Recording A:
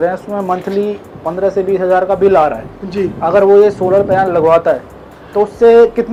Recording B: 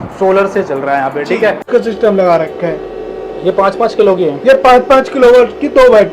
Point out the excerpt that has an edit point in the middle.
B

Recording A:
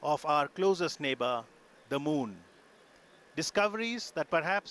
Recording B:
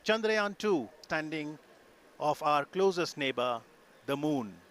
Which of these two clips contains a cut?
B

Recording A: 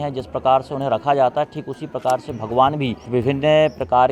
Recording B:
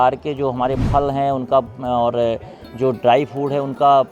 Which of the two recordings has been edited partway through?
A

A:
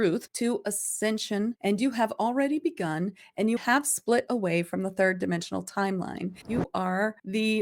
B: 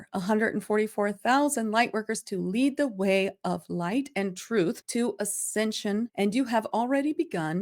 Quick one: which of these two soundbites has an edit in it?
A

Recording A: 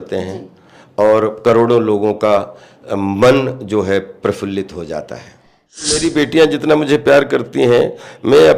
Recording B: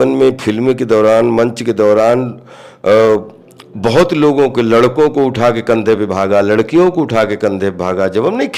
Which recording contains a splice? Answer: A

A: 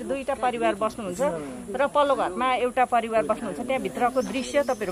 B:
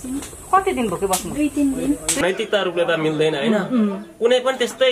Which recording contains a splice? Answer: B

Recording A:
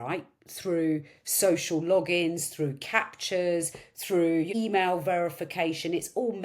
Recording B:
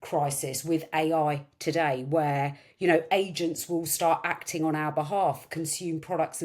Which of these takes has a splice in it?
A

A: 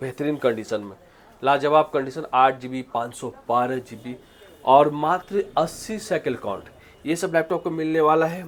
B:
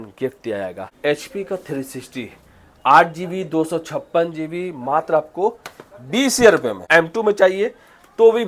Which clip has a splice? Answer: B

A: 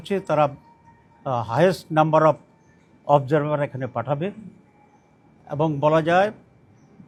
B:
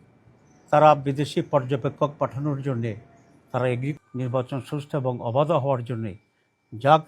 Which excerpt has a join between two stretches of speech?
B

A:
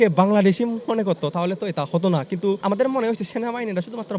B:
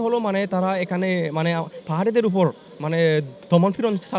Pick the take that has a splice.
A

